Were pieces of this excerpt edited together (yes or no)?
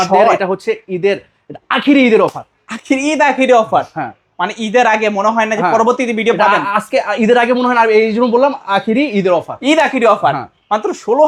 no